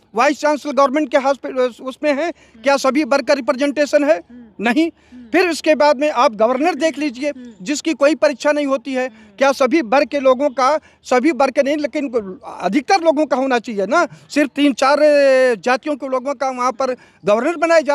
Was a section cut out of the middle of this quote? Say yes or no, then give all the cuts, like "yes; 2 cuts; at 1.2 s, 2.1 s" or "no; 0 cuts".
no; 0 cuts